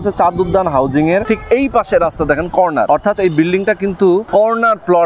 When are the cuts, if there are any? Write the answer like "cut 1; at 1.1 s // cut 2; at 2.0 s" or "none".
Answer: cut 1; at 1.2 s // cut 2; at 2.9 s // cut 3; at 4.3 s